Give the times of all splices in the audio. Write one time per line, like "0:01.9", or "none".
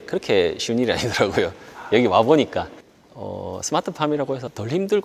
0:02.8